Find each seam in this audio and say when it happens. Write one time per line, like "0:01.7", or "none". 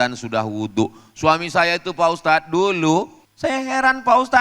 0:03.2